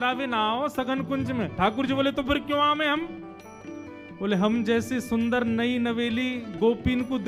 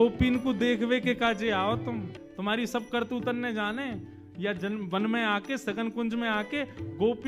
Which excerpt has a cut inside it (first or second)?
second